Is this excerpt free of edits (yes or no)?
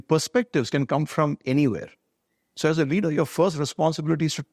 yes